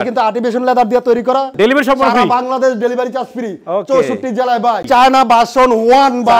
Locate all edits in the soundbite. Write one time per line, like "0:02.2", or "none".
0:01.5
0:04.8